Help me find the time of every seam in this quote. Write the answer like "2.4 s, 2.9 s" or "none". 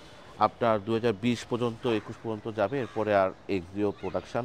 none